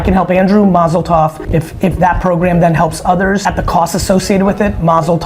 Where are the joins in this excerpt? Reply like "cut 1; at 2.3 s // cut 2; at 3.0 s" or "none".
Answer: cut 1; at 1.4 s // cut 2; at 3.4 s